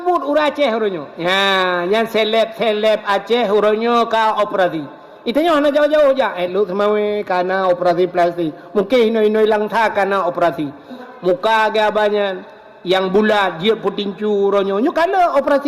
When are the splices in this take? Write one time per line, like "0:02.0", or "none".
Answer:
0:11.1